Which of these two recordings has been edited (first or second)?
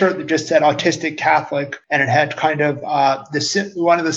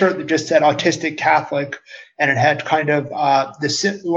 first